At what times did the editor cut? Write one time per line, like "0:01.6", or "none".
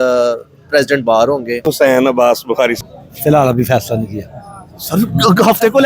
0:01.7
0:02.8